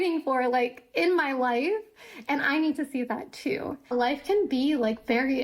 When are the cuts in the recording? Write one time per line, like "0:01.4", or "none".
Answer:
0:03.9